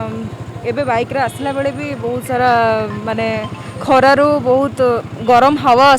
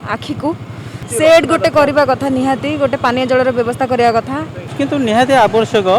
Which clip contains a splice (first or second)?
second